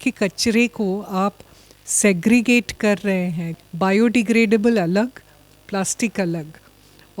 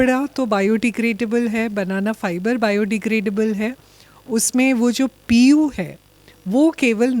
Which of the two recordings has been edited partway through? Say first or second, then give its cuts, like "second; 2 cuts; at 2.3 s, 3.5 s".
first; 1 cut; at 3.5 s